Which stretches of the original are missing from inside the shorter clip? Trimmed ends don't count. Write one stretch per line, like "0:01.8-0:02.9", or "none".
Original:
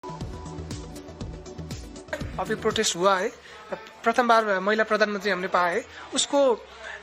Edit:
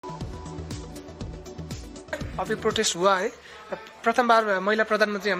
none